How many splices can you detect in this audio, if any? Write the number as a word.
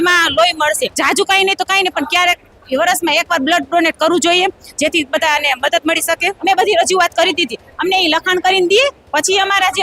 two